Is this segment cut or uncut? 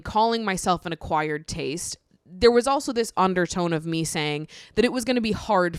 uncut